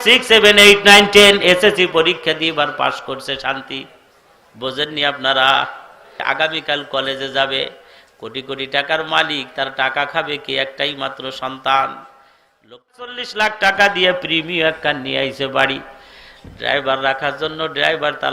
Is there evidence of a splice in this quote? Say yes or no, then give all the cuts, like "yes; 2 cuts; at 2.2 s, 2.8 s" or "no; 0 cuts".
yes; 2 cuts; at 6.2 s, 13.1 s